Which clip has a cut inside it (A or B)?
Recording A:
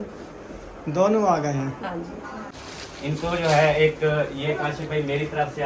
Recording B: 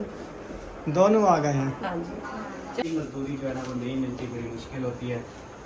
A